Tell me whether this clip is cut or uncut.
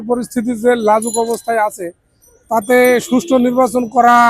uncut